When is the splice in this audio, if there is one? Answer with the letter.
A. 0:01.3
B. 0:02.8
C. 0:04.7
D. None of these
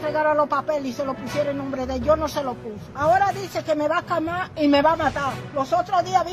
B